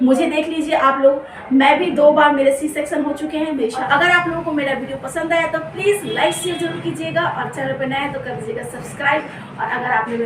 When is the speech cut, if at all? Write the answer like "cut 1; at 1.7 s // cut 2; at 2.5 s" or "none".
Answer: cut 1; at 3.8 s